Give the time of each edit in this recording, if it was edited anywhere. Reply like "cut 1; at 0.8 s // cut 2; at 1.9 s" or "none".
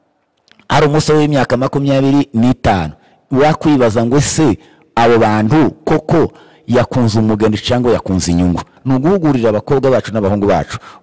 cut 1; at 8.7 s